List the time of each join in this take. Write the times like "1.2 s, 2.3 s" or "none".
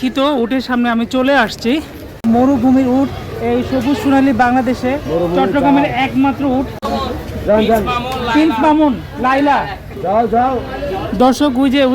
2.2 s, 7.0 s